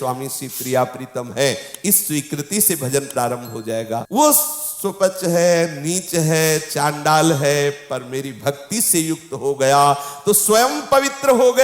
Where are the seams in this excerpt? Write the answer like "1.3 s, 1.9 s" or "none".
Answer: 4.0 s